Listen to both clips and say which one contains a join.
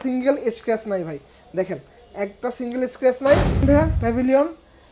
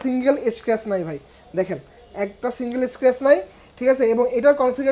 first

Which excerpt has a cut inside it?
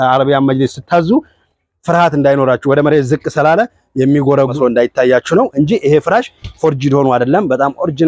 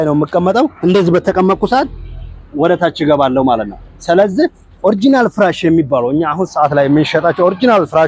first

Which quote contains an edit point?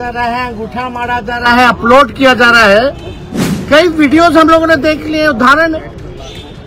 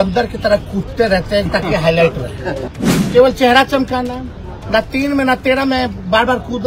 second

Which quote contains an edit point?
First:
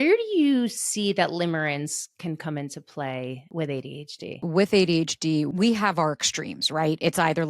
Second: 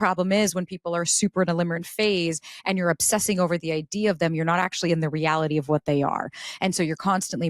first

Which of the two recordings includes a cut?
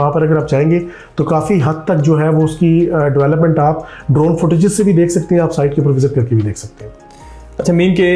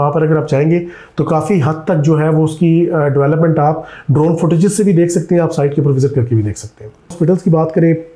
second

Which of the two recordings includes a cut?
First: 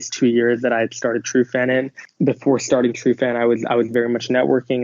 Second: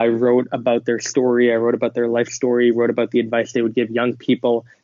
first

